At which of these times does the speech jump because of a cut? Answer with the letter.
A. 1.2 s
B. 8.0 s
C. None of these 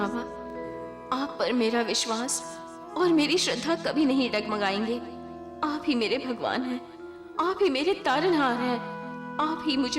C